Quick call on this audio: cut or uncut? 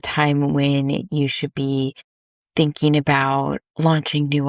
uncut